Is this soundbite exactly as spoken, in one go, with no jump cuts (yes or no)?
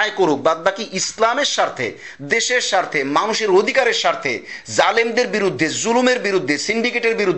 yes